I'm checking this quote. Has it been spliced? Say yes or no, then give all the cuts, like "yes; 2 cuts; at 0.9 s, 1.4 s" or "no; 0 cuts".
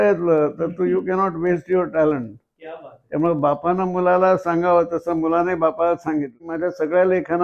yes; 1 cut; at 6.5 s